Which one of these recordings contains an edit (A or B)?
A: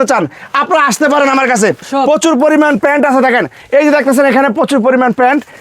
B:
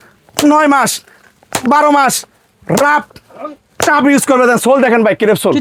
A